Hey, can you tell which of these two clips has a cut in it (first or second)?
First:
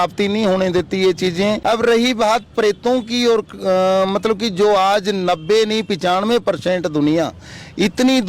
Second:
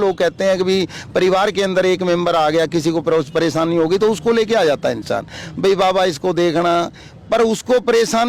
first